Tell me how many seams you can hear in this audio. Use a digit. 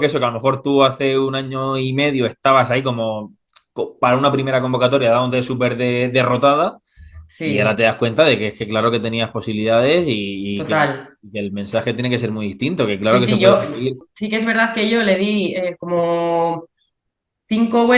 1